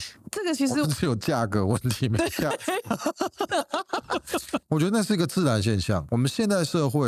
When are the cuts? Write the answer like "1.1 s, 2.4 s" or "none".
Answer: 4.6 s, 6.0 s